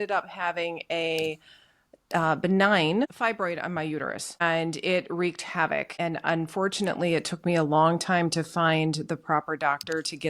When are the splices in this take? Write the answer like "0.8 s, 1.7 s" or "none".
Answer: 3.1 s, 4.4 s, 5.9 s